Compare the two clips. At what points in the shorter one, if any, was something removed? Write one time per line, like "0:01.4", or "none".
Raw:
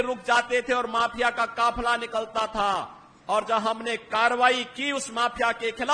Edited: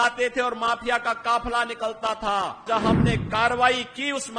0:02.6

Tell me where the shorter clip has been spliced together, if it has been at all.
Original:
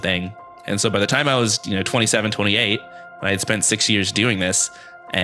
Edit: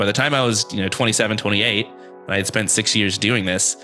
none

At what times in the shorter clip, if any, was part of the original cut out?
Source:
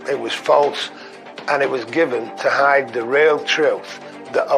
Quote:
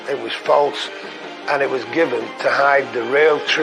none

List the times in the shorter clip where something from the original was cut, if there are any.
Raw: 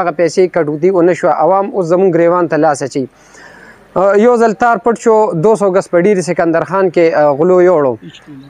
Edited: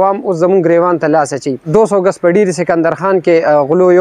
0:01.6

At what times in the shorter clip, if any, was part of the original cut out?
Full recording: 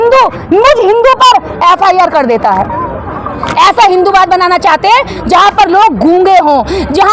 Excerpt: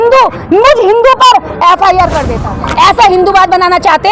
0:02.3

